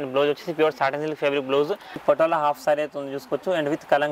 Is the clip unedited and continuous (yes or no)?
no